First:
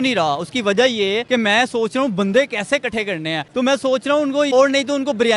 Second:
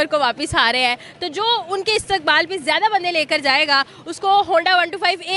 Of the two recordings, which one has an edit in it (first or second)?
first